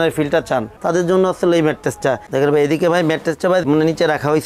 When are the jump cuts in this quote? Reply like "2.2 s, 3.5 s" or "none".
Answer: none